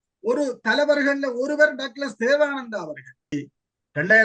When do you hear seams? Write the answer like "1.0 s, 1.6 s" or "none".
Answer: 3.3 s